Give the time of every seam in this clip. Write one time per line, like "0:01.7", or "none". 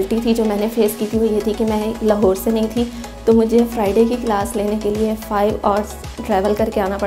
none

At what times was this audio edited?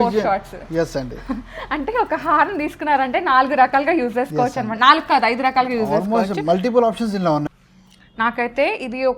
0:07.5

